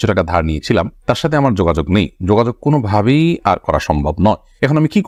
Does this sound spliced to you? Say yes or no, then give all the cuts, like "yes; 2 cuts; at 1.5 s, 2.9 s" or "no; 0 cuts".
no; 0 cuts